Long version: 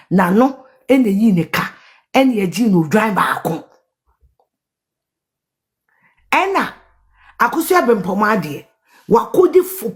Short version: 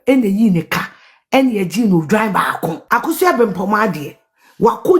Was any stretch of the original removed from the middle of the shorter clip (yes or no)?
yes